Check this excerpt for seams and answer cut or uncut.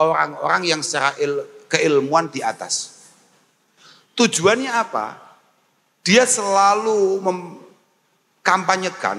uncut